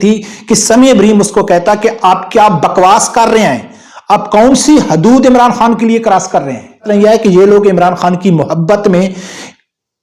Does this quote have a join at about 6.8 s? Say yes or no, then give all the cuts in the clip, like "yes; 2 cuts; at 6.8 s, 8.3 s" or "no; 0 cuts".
yes; 1 cut; at 6.8 s